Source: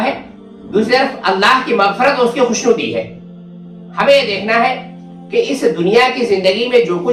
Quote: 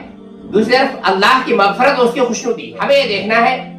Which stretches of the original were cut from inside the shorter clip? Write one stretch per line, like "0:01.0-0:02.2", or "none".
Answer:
0:02.7-0:03.7